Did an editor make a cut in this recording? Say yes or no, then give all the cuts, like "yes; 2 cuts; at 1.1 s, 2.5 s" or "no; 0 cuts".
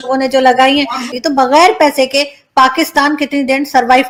no; 0 cuts